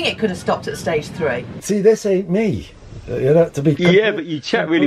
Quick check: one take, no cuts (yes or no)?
no